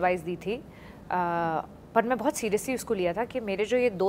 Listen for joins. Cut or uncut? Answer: uncut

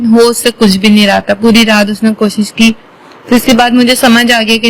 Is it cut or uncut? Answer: uncut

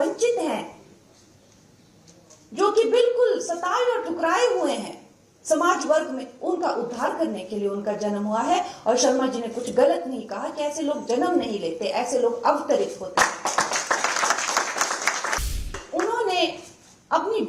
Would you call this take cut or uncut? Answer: cut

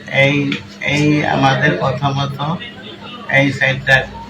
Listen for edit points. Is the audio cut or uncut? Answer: uncut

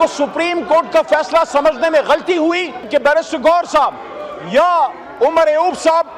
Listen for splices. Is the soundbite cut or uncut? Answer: cut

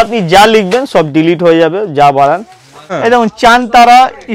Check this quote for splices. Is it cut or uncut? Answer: cut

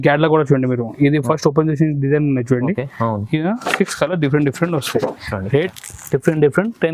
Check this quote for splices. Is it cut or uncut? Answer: cut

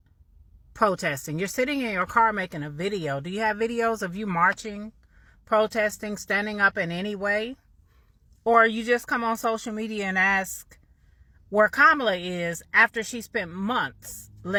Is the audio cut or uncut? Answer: uncut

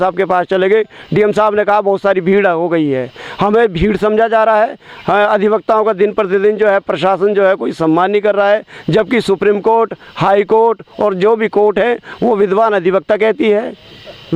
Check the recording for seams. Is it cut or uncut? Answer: uncut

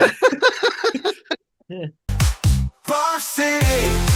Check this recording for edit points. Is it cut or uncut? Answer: cut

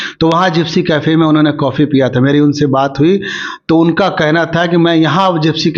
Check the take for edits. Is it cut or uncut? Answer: uncut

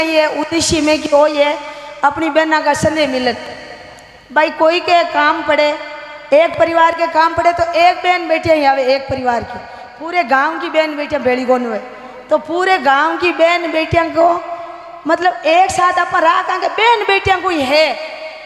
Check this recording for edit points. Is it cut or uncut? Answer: uncut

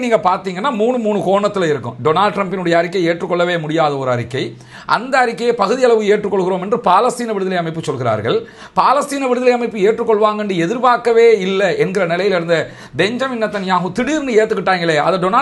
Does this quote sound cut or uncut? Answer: uncut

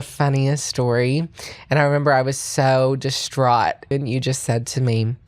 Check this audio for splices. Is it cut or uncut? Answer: cut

